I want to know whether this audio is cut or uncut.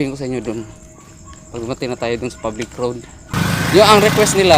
cut